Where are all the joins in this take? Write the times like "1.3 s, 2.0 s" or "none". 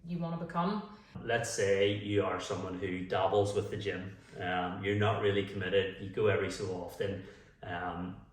1.2 s